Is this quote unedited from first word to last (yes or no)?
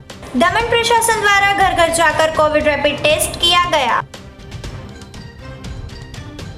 yes